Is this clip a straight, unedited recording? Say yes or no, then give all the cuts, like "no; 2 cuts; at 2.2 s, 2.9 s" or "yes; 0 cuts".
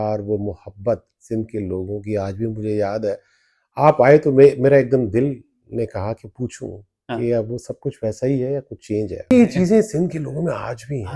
no; 1 cut; at 9.3 s